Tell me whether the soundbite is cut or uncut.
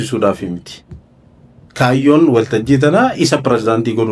uncut